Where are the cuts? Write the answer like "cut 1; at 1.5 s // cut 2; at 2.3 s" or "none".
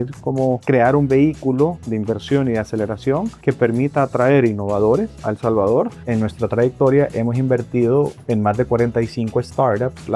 cut 1; at 6.0 s